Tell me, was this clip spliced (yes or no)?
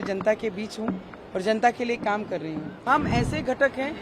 yes